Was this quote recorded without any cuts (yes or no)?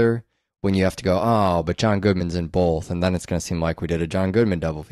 yes